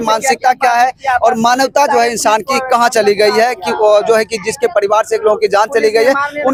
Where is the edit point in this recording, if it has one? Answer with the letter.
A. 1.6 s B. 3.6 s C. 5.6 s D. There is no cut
D